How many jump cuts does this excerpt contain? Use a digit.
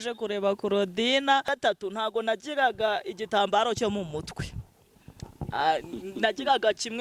1